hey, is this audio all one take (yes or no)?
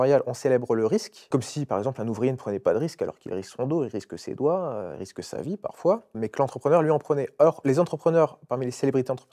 no